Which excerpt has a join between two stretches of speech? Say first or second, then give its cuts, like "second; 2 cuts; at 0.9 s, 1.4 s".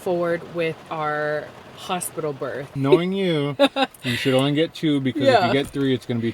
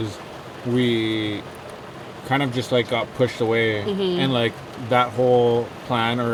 first; 1 cut; at 2.7 s